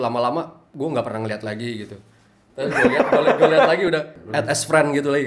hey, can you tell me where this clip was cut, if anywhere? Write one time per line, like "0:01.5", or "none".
0:04.2